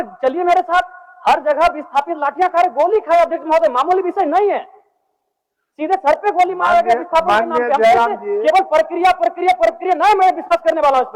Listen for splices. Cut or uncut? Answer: uncut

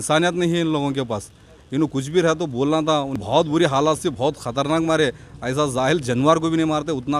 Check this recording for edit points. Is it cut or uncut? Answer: cut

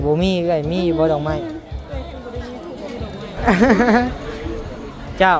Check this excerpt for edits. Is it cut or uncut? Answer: cut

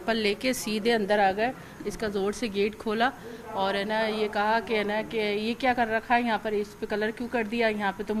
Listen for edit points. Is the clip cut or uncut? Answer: uncut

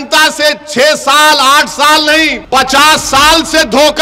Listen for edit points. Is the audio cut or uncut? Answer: cut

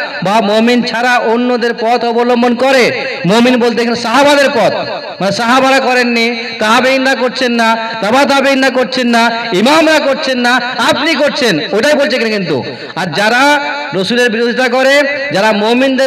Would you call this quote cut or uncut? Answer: uncut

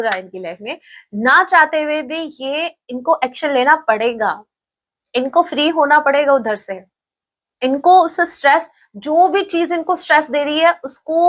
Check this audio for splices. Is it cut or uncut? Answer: uncut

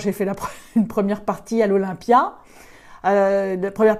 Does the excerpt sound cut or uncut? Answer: uncut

